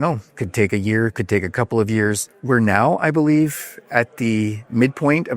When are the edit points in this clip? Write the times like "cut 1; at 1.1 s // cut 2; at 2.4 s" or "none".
cut 1; at 2.2 s